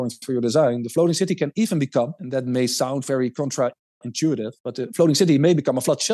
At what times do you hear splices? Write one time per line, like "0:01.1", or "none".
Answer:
none

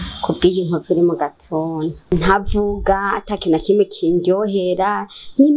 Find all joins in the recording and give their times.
0:02.0

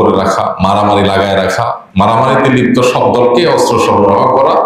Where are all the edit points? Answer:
0:01.8

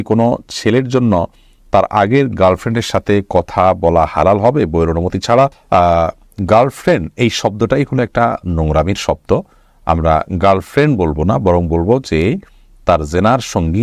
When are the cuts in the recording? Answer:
none

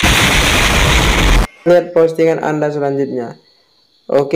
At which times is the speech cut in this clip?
0:01.7

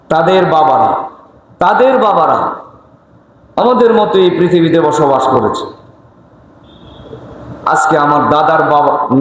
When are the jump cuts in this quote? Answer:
none

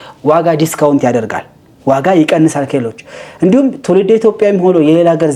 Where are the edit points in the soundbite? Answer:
none

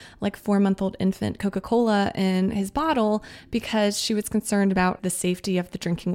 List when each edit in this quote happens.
0:05.0

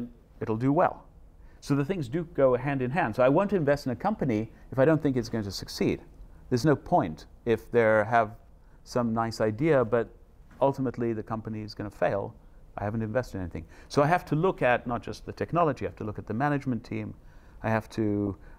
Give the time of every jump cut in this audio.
0:01.5

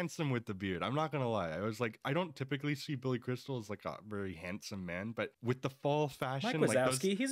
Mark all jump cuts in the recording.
0:05.4

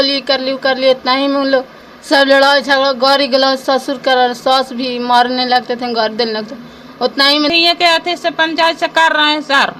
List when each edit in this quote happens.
0:07.5

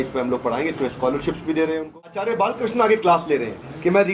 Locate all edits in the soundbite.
0:02.3

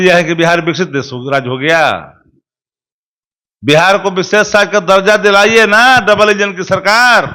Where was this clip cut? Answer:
none

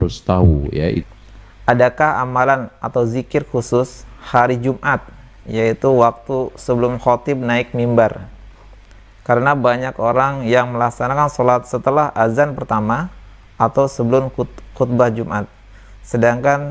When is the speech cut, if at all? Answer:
0:01.0

